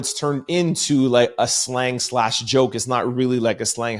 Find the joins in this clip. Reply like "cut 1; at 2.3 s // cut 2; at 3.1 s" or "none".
none